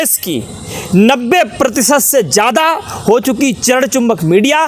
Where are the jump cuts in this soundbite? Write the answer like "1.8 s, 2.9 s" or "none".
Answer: none